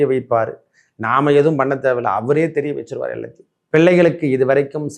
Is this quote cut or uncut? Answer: cut